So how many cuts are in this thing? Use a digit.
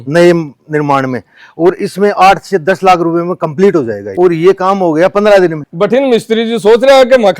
2